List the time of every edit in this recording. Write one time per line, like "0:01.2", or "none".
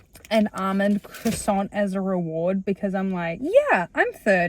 0:03.4